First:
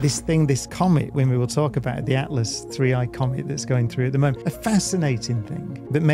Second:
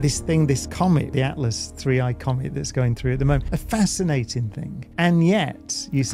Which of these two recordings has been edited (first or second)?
second